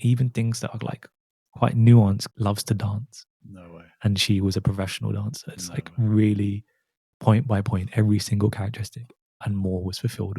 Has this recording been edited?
yes; 2 cuts; at 2.3 s, 9.4 s

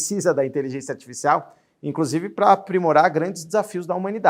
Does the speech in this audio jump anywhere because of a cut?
no; 0 cuts

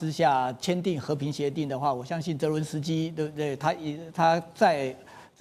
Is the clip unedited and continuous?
yes; 0 cuts

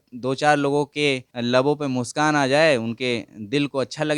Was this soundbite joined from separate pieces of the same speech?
yes; 1 cut; at 1.3 s

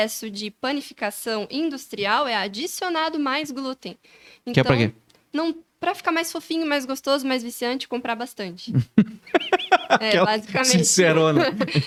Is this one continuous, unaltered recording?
yes; 0 cuts

